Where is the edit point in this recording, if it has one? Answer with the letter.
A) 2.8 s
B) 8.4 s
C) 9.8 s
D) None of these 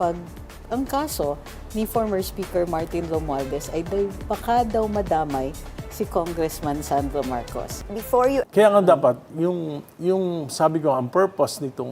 B